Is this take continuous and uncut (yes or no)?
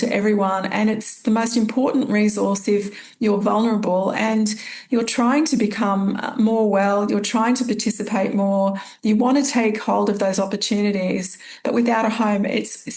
yes